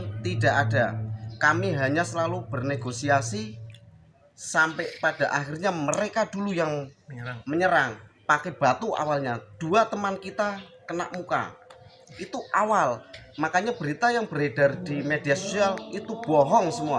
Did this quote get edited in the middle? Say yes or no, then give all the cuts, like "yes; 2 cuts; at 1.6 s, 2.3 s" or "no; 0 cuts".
no; 0 cuts